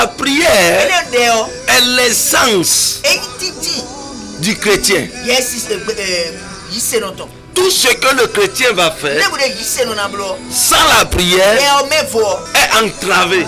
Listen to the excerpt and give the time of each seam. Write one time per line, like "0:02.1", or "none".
0:10.5
0:12.4